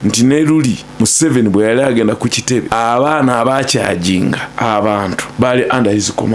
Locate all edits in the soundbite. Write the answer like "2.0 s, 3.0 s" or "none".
0.9 s, 2.7 s, 4.5 s, 5.3 s